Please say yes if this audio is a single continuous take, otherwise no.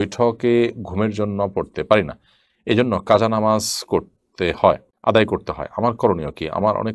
no